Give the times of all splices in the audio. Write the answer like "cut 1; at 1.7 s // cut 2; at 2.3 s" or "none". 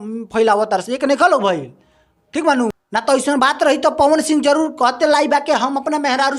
cut 1; at 2.8 s